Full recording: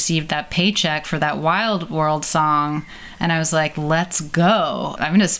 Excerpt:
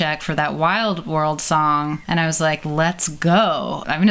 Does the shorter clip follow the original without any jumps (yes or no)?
no